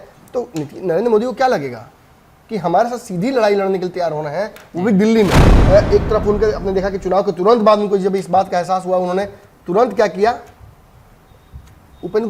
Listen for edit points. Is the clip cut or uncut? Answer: cut